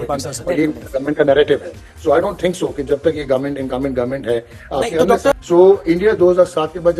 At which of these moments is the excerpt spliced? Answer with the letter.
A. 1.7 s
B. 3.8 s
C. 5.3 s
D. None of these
C